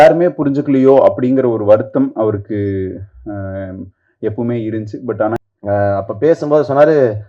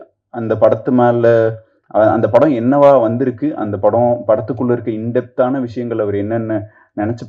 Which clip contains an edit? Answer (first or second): first